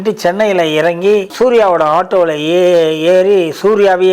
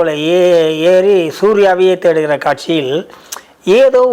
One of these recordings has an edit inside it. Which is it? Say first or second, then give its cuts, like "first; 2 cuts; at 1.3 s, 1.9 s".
first; 1 cut; at 1.3 s